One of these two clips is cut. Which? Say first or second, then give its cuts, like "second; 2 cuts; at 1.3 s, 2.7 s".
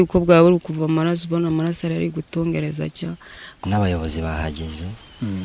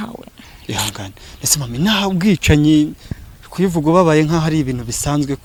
first; 1 cut; at 3.6 s